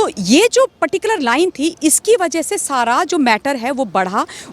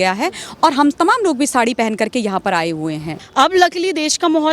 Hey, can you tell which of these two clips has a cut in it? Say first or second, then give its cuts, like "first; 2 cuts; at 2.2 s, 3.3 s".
second; 1 cut; at 3.2 s